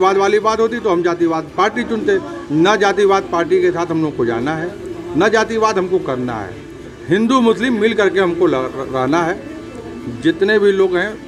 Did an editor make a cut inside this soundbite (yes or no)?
no